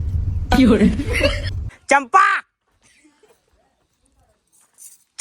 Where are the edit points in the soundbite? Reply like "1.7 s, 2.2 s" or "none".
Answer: 1.4 s